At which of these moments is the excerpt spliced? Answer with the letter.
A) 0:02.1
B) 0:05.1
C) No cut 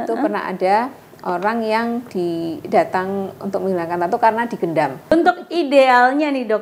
B